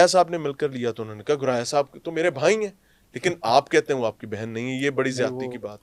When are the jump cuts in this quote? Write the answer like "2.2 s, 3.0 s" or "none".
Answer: none